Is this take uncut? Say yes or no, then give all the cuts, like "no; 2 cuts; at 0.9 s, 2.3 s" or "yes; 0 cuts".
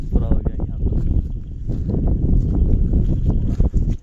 yes; 0 cuts